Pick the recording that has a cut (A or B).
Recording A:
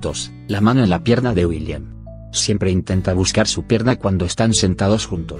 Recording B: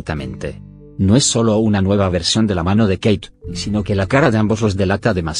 B